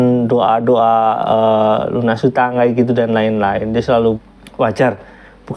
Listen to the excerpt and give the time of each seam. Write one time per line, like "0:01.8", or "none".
0:04.2